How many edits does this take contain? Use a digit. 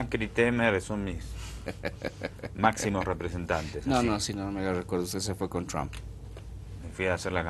1